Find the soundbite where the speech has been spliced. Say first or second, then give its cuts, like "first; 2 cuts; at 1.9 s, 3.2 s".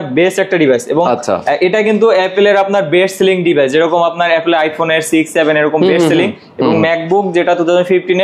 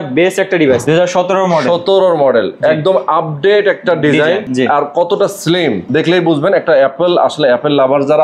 second; 3 cuts; at 0.8 s, 4.5 s, 5.8 s